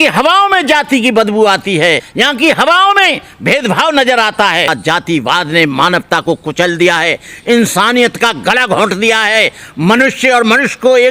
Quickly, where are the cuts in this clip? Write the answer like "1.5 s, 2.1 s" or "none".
2.1 s